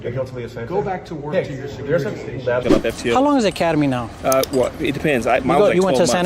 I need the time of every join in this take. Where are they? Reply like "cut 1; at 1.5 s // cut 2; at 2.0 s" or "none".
cut 1; at 2.6 s